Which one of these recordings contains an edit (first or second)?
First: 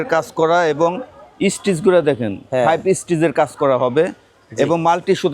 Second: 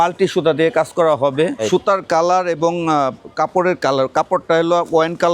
second